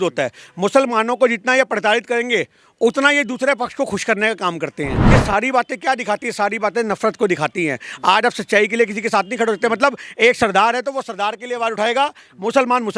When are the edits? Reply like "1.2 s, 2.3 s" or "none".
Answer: 5.0 s